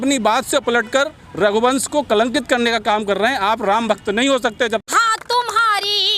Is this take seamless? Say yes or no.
no